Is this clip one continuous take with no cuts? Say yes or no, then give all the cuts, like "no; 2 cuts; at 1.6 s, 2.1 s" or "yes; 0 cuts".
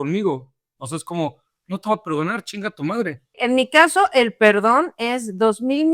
no; 1 cut; at 3.4 s